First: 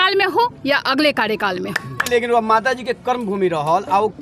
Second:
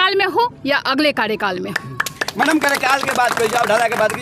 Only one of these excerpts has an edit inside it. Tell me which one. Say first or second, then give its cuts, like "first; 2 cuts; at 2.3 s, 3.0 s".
first; 1 cut; at 2.1 s